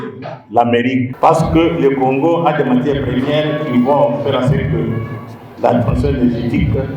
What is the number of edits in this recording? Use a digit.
1